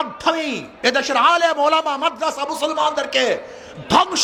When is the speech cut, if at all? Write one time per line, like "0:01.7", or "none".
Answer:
none